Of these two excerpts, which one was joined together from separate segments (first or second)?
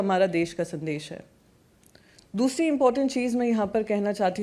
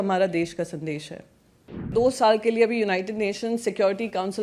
second